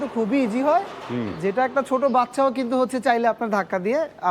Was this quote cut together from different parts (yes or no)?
no